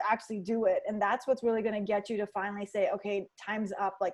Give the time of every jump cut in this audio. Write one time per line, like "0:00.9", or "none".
none

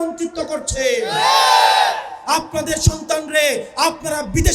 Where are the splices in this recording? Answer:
0:02.1

